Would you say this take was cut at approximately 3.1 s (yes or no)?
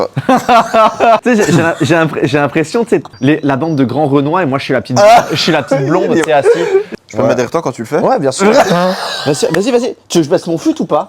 yes